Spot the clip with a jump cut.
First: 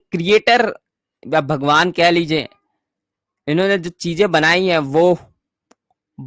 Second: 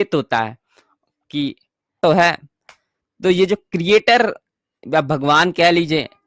second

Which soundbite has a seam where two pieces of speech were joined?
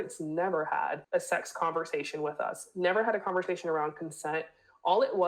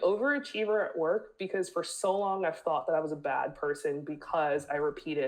first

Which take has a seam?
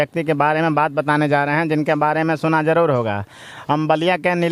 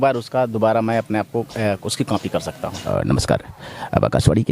second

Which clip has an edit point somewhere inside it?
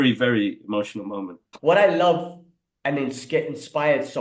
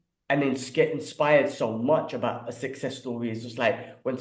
first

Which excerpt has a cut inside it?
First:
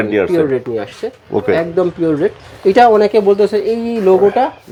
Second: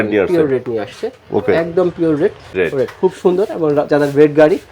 second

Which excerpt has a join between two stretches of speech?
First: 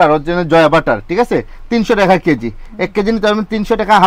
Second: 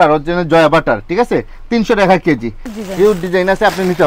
second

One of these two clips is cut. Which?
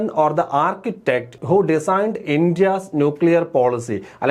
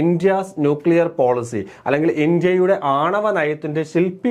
first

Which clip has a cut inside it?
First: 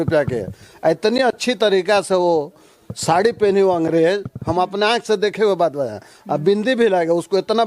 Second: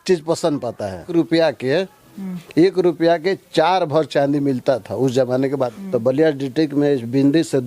second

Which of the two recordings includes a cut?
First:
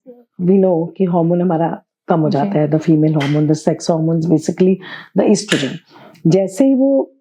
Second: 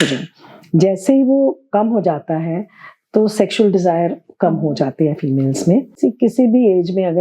second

